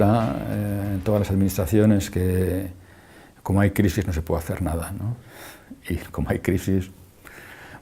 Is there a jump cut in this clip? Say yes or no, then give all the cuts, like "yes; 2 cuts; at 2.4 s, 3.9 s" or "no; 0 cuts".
yes; 1 cut; at 1.8 s